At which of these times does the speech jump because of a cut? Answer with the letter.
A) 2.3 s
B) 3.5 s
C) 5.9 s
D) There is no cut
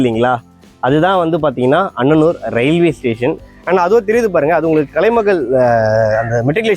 B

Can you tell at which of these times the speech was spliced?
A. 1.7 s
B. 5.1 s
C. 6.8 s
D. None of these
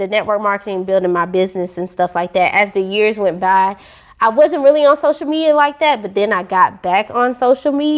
D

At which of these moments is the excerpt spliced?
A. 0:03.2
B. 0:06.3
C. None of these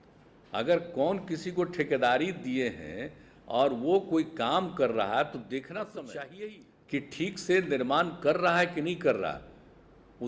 B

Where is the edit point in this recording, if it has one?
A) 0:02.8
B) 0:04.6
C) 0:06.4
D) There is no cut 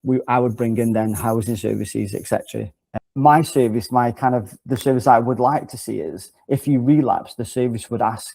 A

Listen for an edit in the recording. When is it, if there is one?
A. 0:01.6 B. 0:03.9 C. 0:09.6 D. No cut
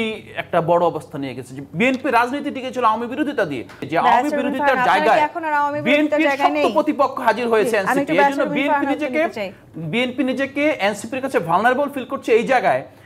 B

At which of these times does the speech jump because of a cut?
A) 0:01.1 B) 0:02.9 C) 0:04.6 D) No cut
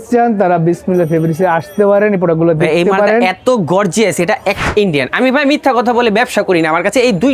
C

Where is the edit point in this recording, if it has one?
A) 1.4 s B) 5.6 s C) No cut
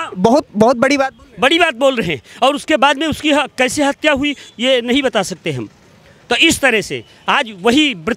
C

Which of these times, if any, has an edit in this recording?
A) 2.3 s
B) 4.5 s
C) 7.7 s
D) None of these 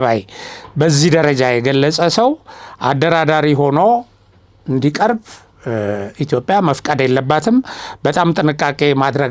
D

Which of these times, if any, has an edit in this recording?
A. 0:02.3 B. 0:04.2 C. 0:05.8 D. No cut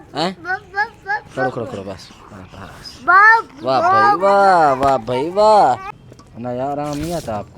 C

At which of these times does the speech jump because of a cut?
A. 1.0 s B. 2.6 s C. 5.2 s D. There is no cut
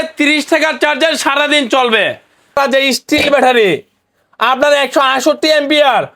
B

